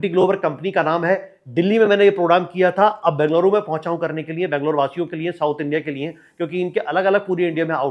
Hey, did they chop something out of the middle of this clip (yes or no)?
no